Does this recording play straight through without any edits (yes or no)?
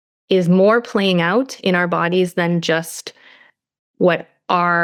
yes